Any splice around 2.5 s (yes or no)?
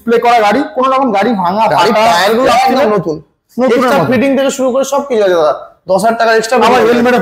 yes